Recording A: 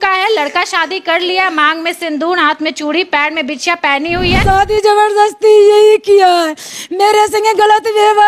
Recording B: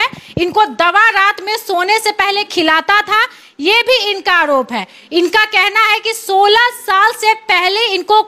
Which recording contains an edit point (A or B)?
A